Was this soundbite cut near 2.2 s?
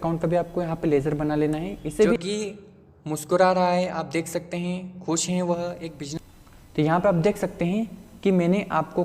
yes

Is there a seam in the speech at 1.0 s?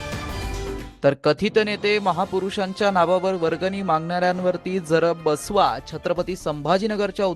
yes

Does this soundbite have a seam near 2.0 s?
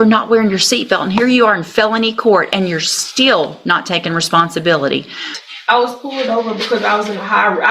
no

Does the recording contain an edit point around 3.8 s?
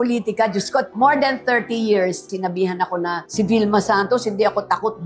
no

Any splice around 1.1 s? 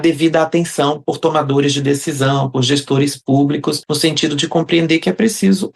no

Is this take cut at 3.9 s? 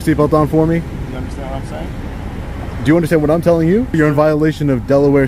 yes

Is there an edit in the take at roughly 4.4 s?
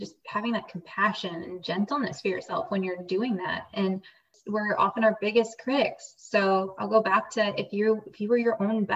yes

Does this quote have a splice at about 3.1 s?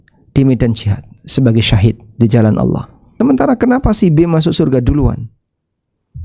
yes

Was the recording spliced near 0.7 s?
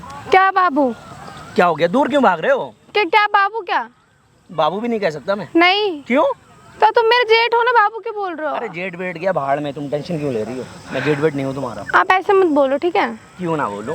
no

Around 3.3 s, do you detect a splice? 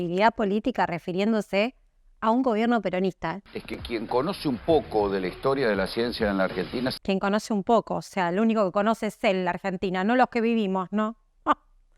yes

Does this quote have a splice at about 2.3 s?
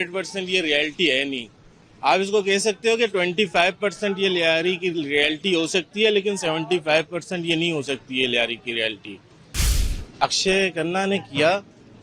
no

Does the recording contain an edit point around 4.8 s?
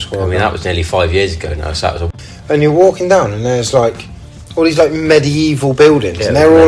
no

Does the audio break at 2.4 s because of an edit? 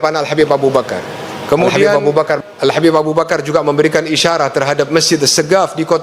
yes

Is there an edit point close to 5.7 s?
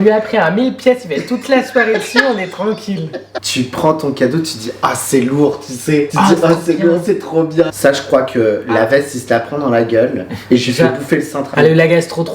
no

